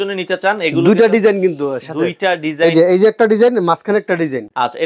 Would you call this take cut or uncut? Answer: uncut